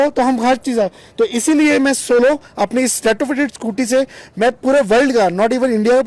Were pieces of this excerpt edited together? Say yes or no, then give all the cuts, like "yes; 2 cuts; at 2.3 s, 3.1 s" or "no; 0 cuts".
no; 0 cuts